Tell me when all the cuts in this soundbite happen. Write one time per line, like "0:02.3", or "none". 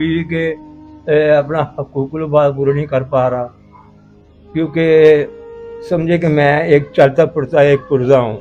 none